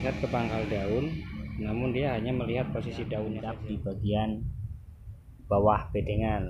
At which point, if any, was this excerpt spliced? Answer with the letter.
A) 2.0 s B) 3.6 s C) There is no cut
B